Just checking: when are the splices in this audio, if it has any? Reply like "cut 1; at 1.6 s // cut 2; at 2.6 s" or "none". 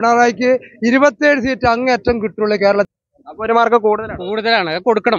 cut 1; at 2.9 s